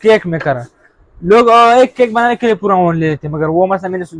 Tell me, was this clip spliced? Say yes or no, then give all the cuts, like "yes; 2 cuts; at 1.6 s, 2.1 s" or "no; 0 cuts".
no; 0 cuts